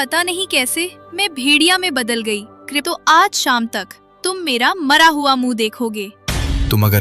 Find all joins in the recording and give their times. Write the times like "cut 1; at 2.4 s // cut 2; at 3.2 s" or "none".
cut 1; at 2.7 s // cut 2; at 6.2 s